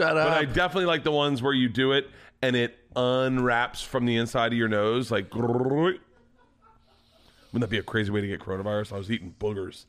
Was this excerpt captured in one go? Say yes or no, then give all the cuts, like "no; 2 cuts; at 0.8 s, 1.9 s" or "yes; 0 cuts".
yes; 0 cuts